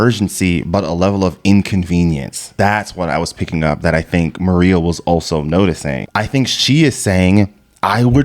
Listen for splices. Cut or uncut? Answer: cut